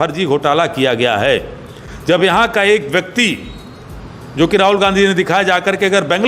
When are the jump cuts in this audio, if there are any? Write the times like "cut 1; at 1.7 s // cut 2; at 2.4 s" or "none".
none